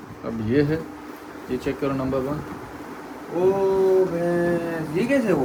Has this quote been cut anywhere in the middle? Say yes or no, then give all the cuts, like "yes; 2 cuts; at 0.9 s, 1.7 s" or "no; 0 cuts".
no; 0 cuts